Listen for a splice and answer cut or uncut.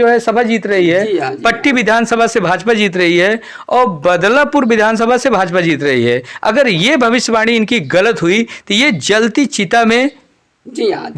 uncut